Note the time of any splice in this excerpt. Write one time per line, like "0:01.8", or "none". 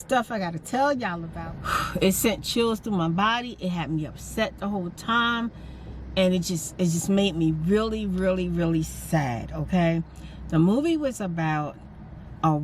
0:01.2